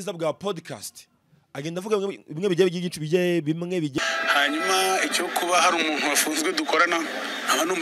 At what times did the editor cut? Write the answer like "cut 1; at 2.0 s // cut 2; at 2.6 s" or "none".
cut 1; at 4.0 s